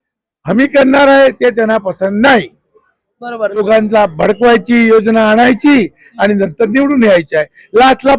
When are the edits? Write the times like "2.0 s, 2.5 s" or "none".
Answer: 3.6 s